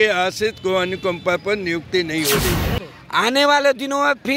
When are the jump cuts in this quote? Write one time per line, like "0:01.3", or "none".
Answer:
0:02.7